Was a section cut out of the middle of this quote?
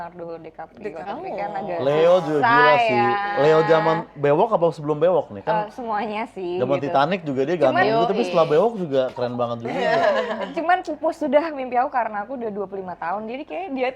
no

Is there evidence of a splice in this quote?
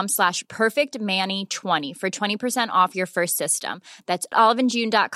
no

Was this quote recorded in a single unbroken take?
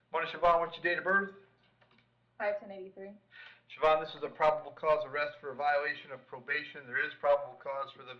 yes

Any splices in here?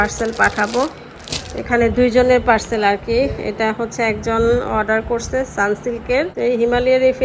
yes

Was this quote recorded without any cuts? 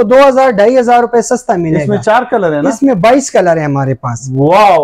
yes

